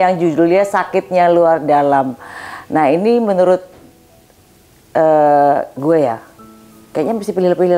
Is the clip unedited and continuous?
yes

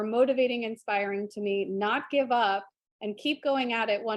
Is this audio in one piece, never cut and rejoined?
yes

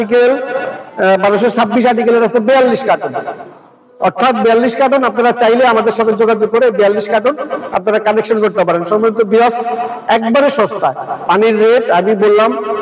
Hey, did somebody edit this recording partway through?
no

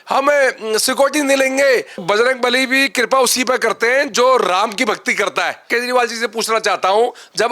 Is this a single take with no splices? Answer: no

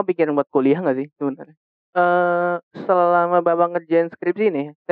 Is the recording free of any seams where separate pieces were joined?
no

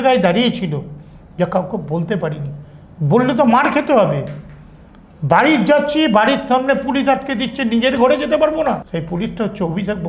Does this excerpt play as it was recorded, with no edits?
no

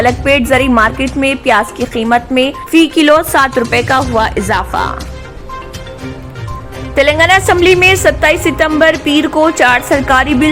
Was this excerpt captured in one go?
yes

